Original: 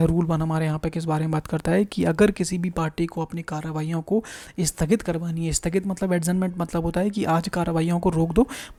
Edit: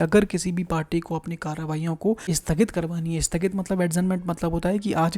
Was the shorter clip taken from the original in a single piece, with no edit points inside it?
no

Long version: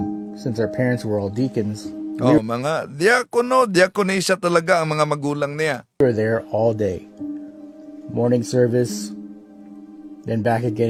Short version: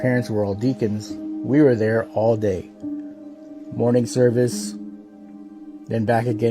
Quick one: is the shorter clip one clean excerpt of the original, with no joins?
no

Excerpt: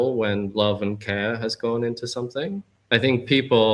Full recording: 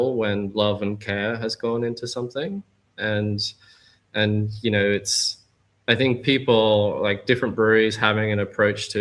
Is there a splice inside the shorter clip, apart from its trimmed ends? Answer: yes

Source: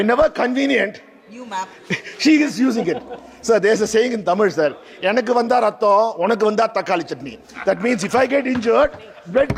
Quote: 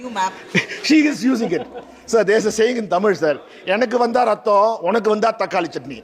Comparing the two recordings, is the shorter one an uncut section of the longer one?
yes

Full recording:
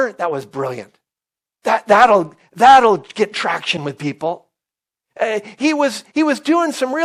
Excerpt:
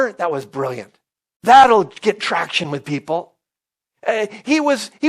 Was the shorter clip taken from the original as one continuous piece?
no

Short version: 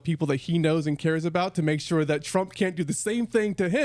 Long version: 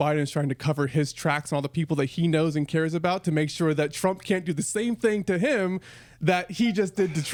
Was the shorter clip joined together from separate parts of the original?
no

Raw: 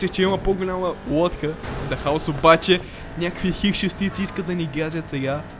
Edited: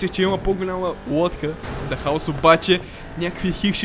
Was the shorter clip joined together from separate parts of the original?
no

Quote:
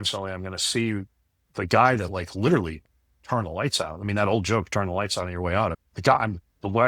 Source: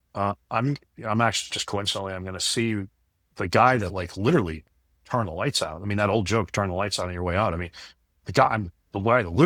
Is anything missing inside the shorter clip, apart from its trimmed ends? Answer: yes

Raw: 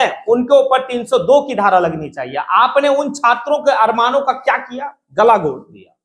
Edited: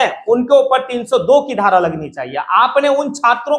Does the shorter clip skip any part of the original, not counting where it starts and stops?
no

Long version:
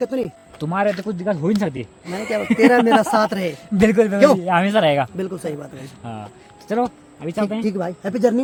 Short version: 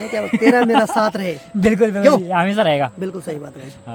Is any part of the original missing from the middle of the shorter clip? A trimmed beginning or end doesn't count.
no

